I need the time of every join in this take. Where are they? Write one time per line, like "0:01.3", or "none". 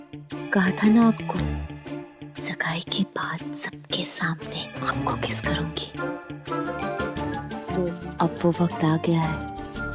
0:07.1